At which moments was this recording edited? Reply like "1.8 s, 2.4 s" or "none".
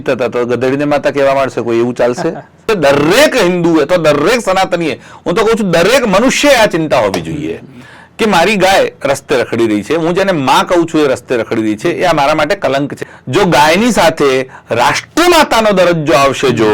2.6 s, 13.0 s

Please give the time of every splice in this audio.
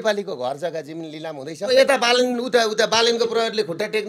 1.7 s

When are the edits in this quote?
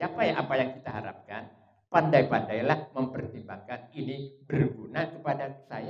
none

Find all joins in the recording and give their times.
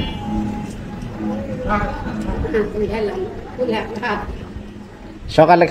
none

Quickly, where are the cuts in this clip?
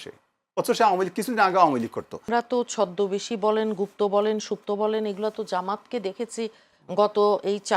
2.2 s

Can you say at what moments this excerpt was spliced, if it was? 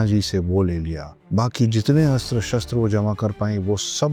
none

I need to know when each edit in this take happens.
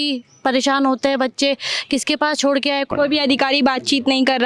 2.9 s

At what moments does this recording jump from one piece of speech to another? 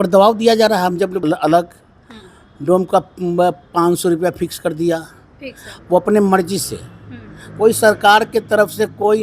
1.2 s

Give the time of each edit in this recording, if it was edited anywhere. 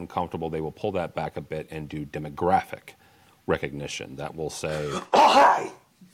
5.1 s

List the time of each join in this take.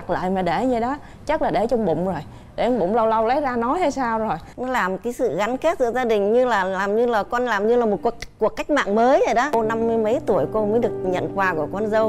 4.5 s, 9.6 s

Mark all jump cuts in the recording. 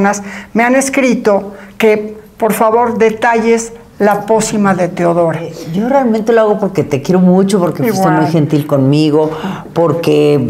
5.5 s

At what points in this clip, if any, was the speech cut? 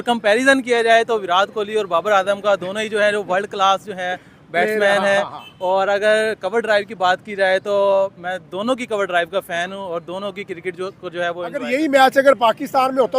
11.6 s

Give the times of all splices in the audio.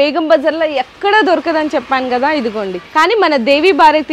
2.8 s

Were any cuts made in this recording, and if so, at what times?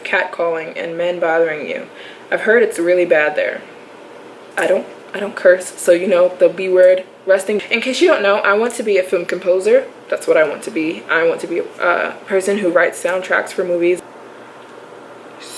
4.4 s, 7.6 s, 14.0 s

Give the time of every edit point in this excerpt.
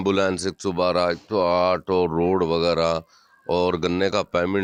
none

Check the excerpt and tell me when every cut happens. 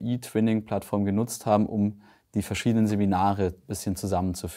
none

